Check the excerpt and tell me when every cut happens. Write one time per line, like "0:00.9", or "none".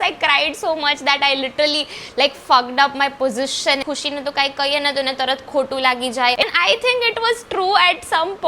0:03.8
0:06.4